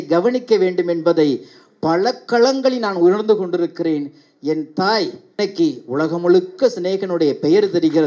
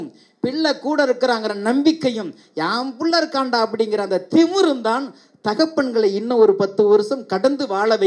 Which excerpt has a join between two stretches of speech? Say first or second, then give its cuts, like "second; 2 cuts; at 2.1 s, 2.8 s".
first; 1 cut; at 5.3 s